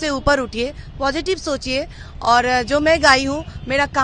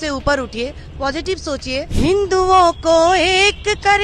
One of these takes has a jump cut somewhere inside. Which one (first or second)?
second